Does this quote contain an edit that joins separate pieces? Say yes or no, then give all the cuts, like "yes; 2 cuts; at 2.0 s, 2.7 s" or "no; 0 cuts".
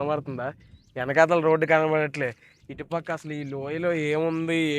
no; 0 cuts